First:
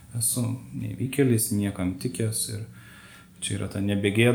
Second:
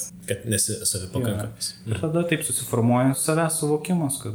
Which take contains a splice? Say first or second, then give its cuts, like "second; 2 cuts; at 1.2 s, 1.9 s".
second; 1 cut; at 3.2 s